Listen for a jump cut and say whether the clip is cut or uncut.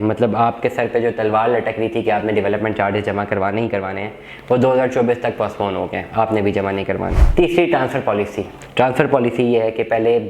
cut